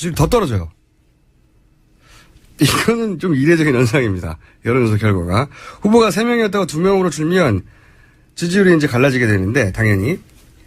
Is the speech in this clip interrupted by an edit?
yes; 1 cut; at 9.1 s

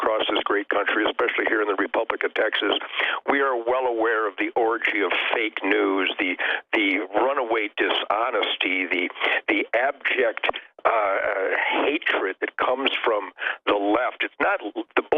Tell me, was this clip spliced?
no; 0 cuts

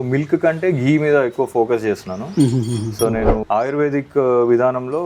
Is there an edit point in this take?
no; 0 cuts

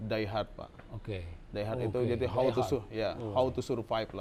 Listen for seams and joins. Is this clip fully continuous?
yes; 0 cuts

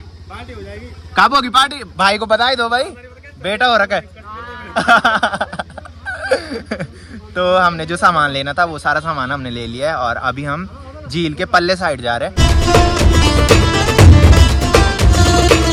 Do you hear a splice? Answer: no; 0 cuts

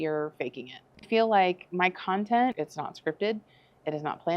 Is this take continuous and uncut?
no; 2 cuts; at 1.1 s, 2.5 s

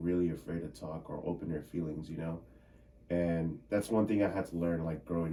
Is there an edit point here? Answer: no; 0 cuts

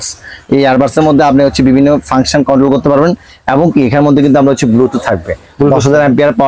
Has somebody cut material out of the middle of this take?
no; 0 cuts

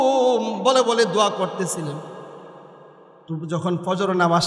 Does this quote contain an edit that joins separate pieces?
no; 0 cuts

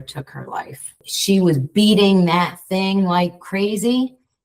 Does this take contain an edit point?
yes; 1 cut; at 1.1 s

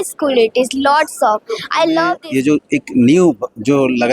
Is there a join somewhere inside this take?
yes; 1 cut; at 2.2 s

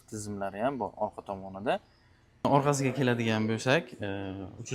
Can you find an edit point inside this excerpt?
yes; 1 cut; at 2.3 s

